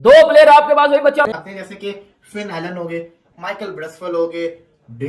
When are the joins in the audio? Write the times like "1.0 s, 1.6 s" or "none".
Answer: 1.2 s